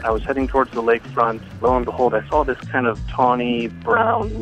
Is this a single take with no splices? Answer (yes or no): no